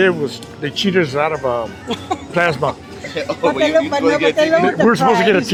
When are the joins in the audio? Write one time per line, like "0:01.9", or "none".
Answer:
none